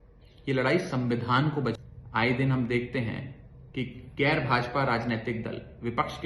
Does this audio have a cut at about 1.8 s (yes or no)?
yes